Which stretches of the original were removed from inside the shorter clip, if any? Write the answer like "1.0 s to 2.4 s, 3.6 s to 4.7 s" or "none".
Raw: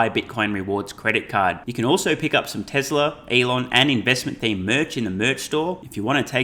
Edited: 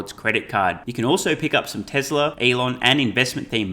3.2 s to 3.3 s